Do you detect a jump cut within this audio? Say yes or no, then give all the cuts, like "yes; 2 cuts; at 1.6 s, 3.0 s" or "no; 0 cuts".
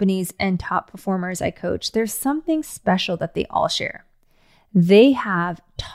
no; 0 cuts